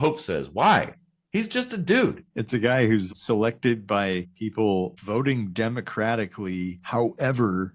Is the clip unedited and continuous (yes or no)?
no